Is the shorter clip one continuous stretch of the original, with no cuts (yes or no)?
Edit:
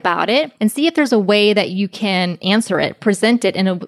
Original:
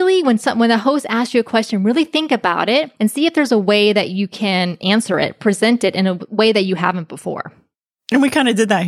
yes